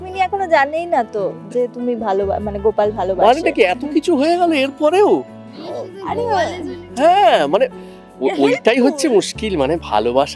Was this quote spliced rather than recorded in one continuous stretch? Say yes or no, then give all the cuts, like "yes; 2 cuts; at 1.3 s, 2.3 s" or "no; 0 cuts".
no; 0 cuts